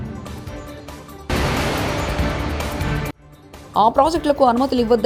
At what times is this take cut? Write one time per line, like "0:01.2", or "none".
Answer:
none